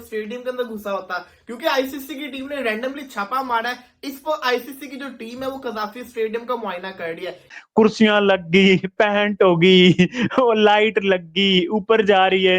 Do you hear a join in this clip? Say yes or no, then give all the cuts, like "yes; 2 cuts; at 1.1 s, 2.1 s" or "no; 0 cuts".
yes; 1 cut; at 7.5 s